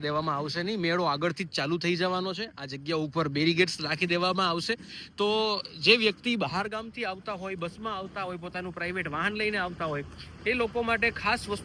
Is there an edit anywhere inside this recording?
no; 0 cuts

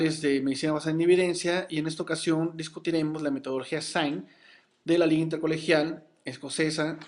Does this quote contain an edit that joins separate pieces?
yes; 1 cut; at 1.4 s

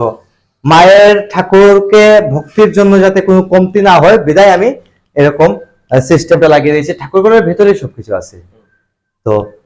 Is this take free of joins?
yes; 0 cuts

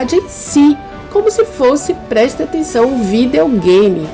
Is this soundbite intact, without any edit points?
yes; 0 cuts

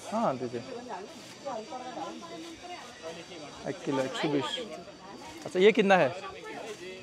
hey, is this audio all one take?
yes; 0 cuts

